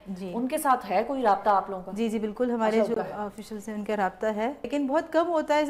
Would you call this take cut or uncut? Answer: cut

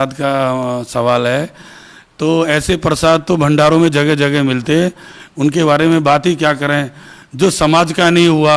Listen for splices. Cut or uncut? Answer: uncut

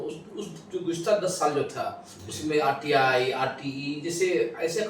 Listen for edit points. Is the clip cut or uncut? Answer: uncut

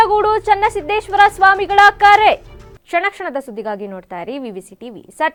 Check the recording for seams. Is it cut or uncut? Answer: uncut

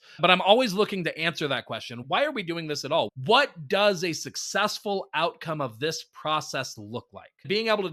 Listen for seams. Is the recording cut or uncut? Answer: uncut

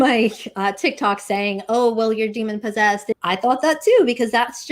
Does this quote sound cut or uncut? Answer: cut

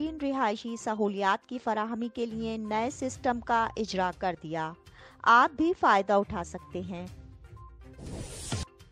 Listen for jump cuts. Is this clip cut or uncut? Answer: cut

